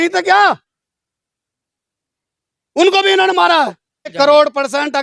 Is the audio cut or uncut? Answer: cut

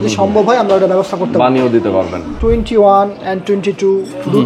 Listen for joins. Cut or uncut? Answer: cut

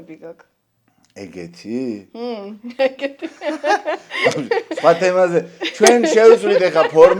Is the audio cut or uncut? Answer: cut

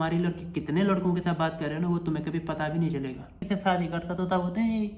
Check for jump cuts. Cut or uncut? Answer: cut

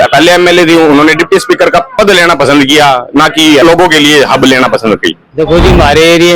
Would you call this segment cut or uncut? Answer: cut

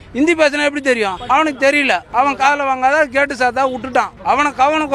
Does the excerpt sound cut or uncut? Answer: cut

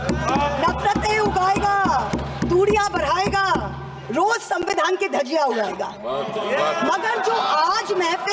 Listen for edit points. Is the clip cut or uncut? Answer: uncut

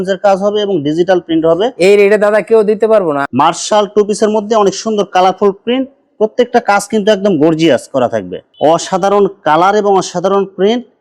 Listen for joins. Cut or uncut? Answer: cut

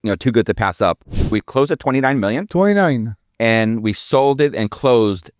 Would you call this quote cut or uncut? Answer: cut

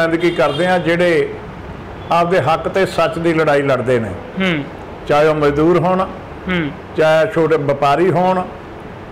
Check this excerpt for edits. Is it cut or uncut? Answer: uncut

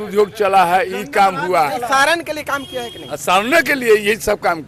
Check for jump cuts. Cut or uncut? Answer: uncut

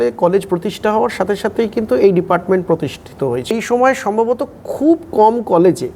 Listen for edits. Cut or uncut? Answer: cut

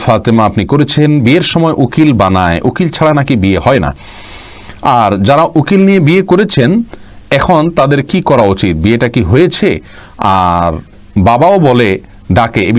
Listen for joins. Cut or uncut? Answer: uncut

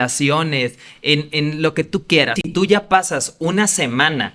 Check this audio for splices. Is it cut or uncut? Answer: cut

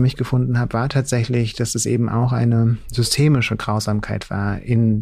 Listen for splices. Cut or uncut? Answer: uncut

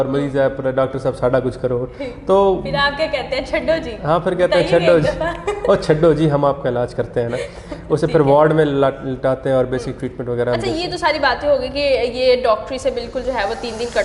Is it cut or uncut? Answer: uncut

